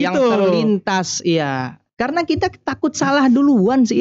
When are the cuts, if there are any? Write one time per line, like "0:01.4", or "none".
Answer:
0:01.8